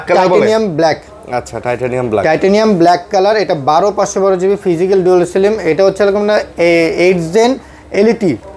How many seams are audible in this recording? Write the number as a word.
zero